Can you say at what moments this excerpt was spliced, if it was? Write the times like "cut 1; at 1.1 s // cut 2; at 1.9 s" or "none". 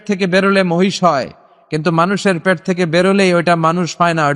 none